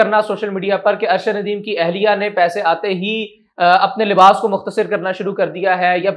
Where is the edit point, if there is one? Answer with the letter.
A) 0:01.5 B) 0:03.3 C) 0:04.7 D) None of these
D